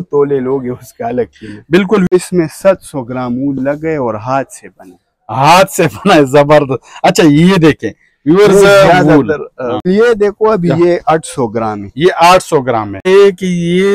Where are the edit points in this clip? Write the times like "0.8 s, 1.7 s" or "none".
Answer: 2.1 s, 9.9 s, 13.0 s